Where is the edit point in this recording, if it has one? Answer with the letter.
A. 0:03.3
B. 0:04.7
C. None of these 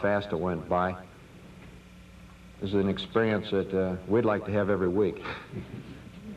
A